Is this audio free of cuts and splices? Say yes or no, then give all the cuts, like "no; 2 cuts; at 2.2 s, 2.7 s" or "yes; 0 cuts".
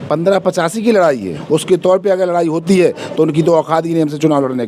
no; 1 cut; at 1.3 s